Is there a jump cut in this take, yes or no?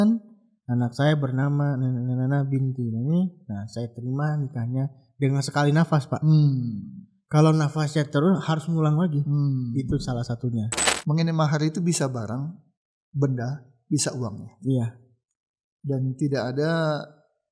yes